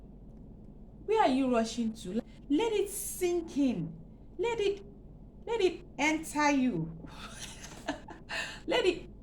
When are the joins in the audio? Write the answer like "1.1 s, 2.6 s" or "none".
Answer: 2.2 s